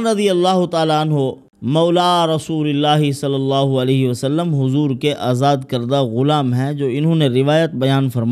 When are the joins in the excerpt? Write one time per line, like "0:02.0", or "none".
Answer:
0:01.5